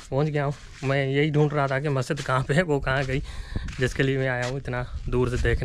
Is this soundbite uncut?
yes; 0 cuts

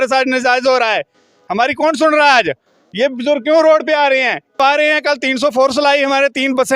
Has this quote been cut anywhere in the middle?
yes; 1 cut; at 4.6 s

